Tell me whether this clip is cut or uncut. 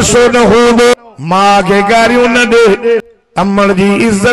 cut